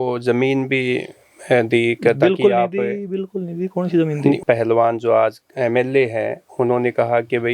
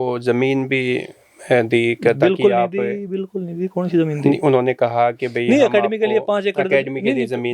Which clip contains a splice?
first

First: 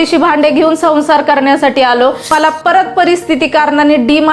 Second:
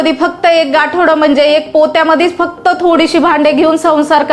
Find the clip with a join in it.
first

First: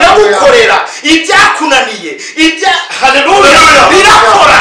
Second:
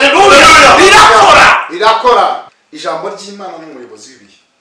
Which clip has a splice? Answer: second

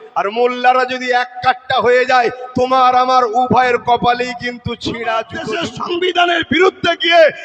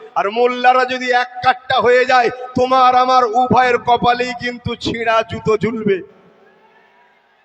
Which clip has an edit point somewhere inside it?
first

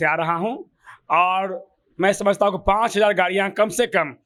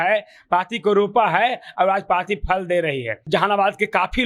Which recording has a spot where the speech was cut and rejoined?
second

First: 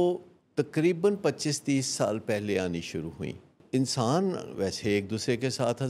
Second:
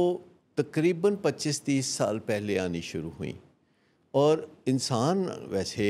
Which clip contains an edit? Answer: first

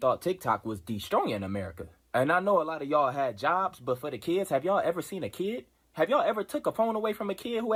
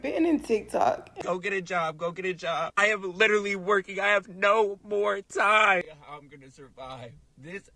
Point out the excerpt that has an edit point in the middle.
second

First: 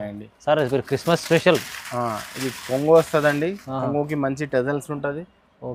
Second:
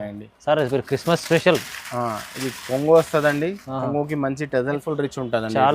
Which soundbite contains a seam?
second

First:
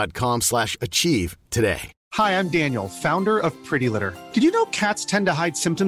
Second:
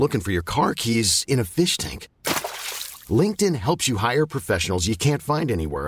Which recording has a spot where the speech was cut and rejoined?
first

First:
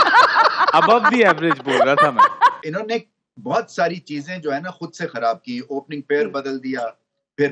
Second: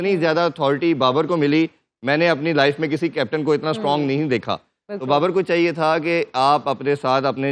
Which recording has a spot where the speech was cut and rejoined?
first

